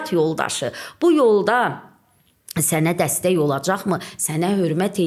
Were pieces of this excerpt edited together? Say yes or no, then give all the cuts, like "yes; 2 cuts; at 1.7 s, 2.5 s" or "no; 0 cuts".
no; 0 cuts